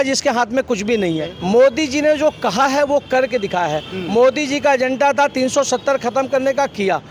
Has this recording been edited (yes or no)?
yes